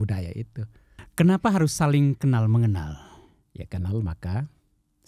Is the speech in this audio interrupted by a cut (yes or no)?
yes